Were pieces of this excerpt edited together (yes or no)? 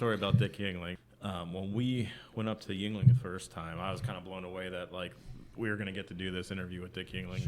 yes